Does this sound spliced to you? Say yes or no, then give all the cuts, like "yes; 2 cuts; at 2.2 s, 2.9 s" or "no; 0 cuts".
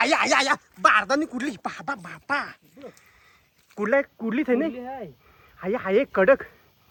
no; 0 cuts